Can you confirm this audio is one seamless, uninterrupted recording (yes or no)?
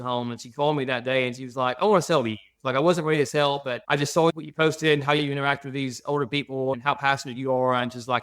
yes